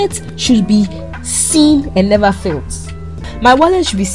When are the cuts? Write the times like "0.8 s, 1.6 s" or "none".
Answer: 3.2 s